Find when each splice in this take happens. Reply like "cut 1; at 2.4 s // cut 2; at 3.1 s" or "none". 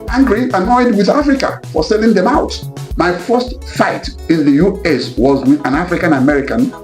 cut 1; at 2.8 s